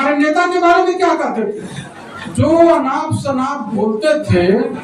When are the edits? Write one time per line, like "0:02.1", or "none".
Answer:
none